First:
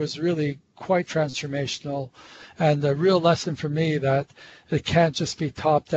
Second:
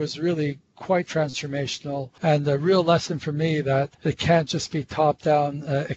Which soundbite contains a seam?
second; 2 cuts; at 2.1 s, 3.9 s

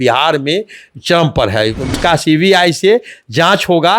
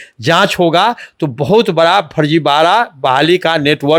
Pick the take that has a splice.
first; 1 cut; at 1.9 s

